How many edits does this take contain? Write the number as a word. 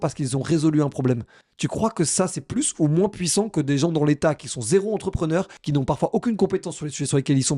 one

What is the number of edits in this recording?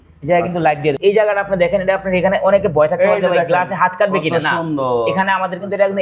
one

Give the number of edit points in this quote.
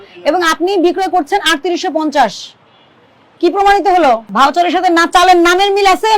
one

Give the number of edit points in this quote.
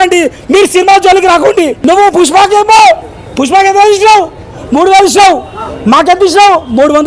one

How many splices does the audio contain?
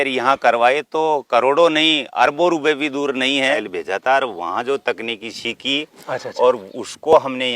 one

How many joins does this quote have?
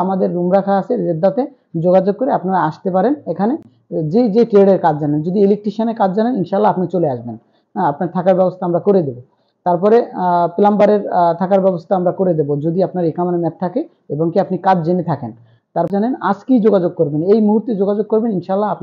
one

